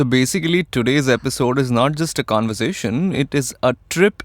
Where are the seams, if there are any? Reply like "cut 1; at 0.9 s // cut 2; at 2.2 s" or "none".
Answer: none